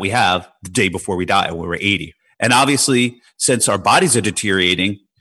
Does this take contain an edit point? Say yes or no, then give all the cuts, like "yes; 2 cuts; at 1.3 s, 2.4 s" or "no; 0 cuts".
yes; 1 cut; at 2.1 s